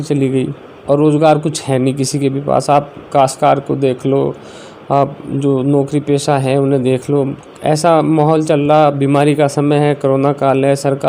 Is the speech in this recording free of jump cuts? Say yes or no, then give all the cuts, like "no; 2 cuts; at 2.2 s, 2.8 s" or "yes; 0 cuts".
yes; 0 cuts